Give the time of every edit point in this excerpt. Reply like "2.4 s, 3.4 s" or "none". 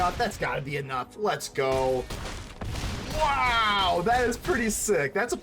none